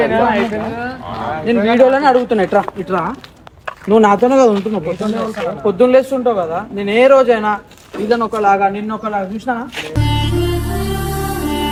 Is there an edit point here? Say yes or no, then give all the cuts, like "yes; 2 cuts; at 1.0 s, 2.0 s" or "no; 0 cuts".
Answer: no; 0 cuts